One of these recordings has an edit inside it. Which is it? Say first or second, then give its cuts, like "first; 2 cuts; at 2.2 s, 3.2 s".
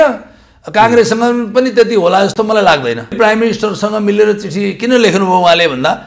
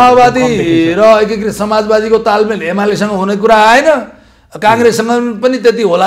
first; 1 cut; at 3.1 s